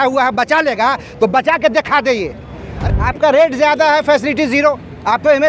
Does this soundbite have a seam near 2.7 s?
yes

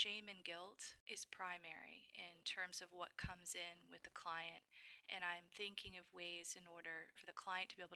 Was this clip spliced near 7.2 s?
yes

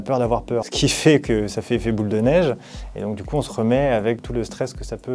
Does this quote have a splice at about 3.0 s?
no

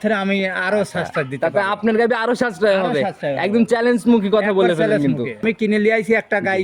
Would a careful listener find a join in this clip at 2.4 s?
no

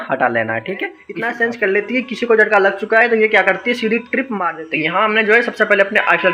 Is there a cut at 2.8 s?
no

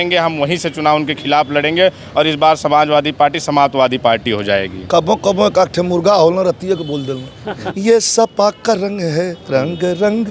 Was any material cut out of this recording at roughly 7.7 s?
yes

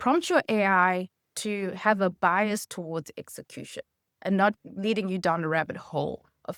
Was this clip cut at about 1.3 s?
no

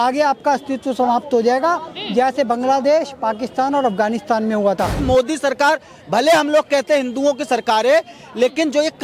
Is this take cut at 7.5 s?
no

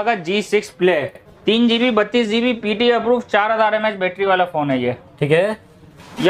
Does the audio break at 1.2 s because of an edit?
yes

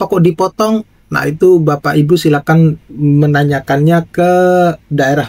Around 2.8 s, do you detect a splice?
no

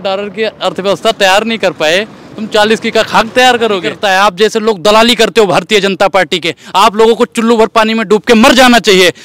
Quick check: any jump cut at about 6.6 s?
no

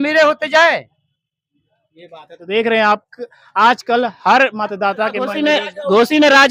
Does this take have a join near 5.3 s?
yes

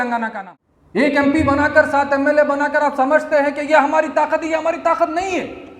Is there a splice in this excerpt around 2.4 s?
no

